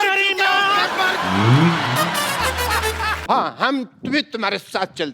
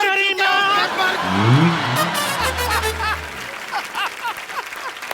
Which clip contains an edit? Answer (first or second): first